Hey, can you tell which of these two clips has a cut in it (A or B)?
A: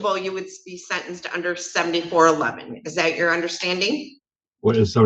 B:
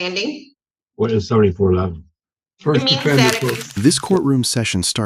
B